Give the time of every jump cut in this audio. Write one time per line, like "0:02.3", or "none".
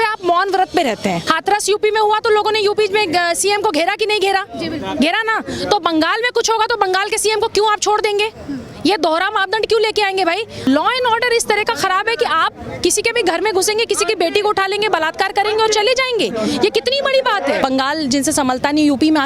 0:01.3
0:10.7
0:17.6